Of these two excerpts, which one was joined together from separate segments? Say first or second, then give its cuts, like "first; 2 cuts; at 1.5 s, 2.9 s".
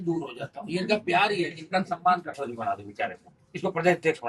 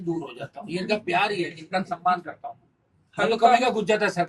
first; 1 cut; at 2.4 s